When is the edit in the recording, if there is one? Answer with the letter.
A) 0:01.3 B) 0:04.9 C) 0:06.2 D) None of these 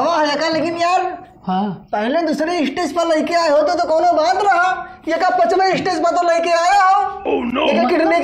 D